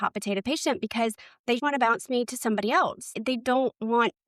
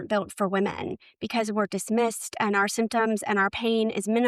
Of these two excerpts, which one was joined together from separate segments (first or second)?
first